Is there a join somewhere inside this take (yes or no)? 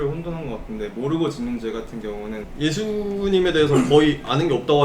yes